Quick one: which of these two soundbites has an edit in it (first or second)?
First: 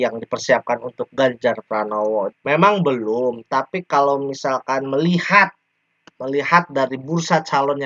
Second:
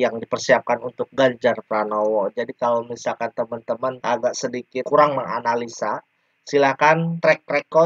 first